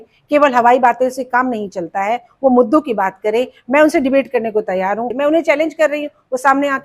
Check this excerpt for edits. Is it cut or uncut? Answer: cut